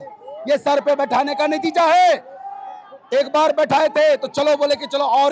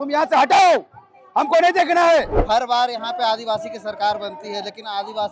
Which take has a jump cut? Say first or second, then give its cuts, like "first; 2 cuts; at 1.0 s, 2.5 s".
second; 1 cut; at 2.4 s